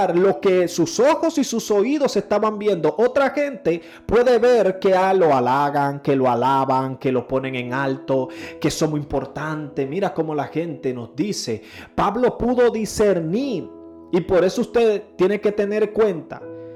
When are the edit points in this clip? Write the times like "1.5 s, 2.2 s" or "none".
none